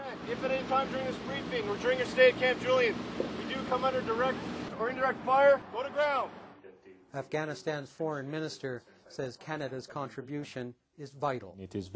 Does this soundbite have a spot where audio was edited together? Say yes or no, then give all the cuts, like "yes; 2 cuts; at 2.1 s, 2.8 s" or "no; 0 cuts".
no; 0 cuts